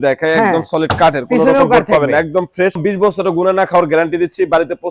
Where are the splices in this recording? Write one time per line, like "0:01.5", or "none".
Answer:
0:02.8